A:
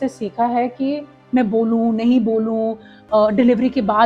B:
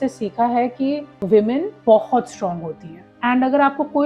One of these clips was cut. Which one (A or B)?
A